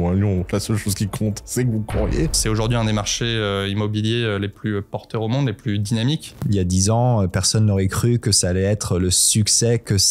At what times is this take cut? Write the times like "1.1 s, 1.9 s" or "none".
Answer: 2.4 s, 6.4 s